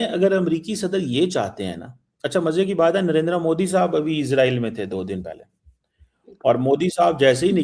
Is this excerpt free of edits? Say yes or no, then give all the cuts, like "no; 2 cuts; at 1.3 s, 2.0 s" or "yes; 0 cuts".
yes; 0 cuts